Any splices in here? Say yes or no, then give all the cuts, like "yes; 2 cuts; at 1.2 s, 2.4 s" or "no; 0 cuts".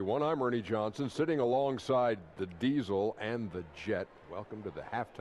no; 0 cuts